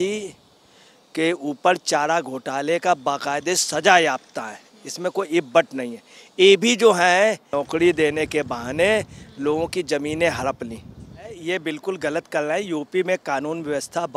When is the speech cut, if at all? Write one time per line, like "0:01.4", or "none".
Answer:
0:11.4